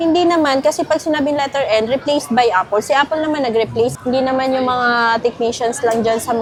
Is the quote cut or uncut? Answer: uncut